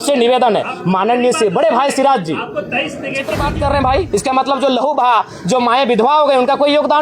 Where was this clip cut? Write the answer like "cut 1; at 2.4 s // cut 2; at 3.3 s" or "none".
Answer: cut 1; at 3.4 s